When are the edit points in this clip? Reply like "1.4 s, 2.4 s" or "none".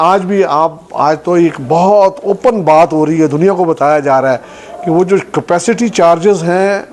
none

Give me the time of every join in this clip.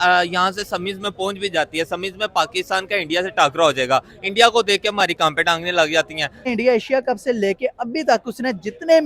6.5 s

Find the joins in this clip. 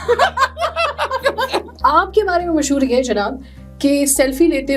1.7 s

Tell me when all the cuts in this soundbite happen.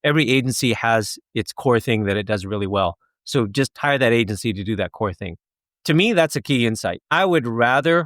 7.0 s

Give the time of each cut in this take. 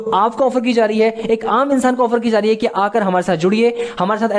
none

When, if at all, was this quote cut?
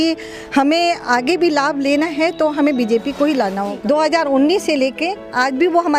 3.7 s

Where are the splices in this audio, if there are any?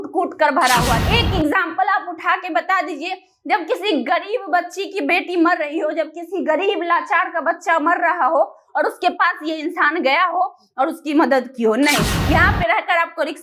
1.0 s, 12.1 s

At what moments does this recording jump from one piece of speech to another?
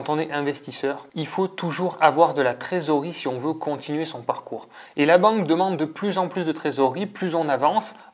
1.1 s

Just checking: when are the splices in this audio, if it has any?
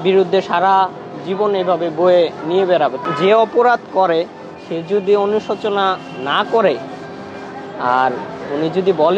3.0 s

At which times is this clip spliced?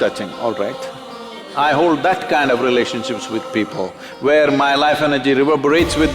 1.4 s

